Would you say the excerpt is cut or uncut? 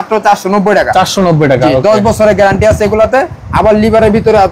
uncut